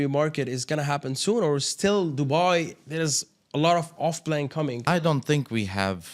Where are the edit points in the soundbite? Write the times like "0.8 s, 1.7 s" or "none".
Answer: 5.0 s